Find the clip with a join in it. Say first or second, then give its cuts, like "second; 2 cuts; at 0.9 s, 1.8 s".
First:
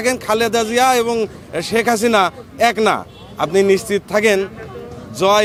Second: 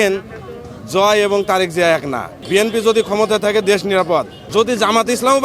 second; 2 cuts; at 2.4 s, 4.4 s